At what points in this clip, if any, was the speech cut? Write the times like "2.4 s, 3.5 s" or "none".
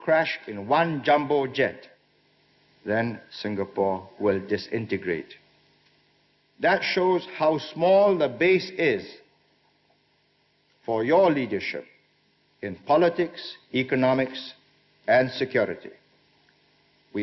none